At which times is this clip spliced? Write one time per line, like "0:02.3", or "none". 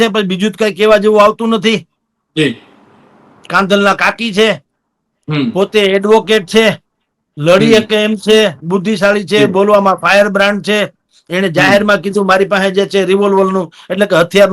none

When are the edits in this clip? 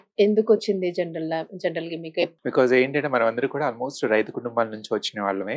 0:02.3

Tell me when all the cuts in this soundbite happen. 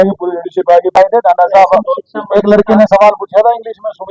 0:00.9

